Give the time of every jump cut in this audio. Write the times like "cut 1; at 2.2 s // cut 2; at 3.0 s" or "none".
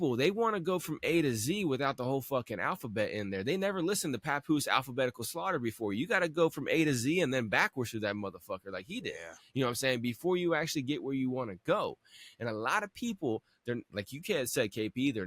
none